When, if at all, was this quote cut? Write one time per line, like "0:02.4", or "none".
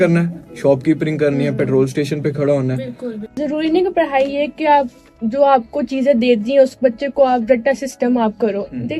0:03.3